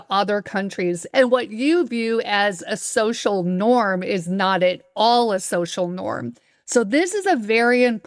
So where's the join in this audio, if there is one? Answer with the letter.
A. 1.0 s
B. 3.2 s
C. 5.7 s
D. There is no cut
A